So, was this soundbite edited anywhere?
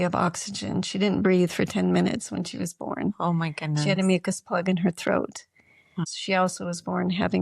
yes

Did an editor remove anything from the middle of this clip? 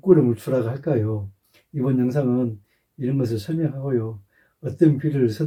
no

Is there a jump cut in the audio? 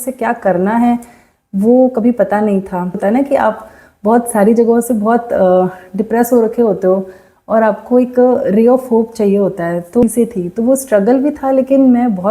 yes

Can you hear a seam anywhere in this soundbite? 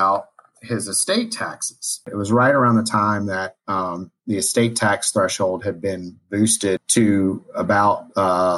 yes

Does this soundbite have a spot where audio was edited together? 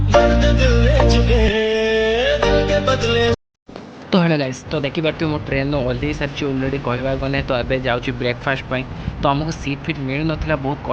no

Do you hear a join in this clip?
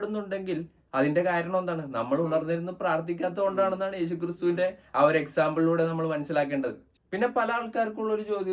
yes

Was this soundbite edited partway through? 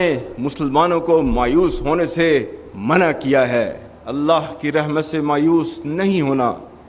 yes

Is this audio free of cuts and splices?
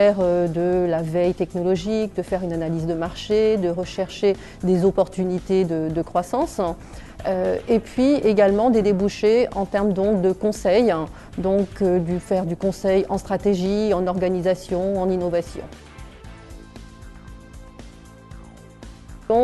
no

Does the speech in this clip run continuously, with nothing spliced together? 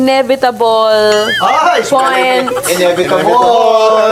yes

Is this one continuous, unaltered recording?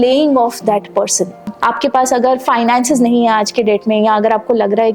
no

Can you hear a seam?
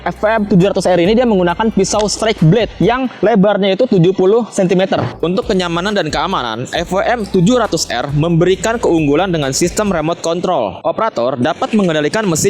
yes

